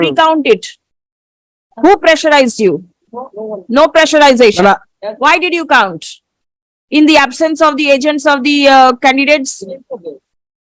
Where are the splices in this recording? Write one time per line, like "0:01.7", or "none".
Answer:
none

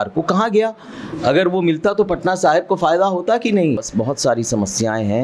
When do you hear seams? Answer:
0:03.9

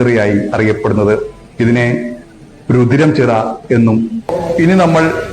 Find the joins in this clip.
0:04.3

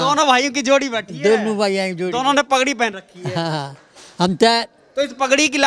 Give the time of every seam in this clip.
none

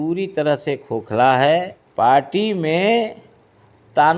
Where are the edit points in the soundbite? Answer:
0:01.8

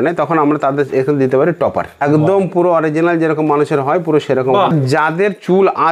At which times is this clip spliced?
0:02.0
0:04.7

